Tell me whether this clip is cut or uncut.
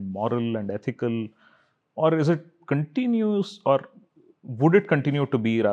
uncut